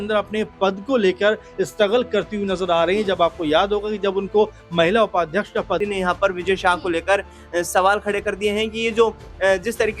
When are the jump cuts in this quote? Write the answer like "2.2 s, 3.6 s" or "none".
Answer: 5.8 s